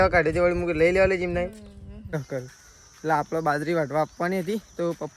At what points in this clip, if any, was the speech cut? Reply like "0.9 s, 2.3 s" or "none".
2.1 s